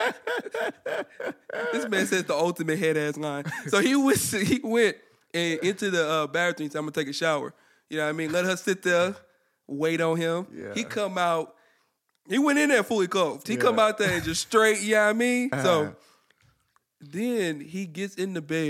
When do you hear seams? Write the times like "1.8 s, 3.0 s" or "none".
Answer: 15.5 s